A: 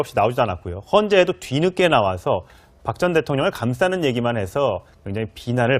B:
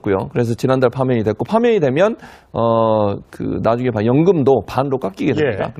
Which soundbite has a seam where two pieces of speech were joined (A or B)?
A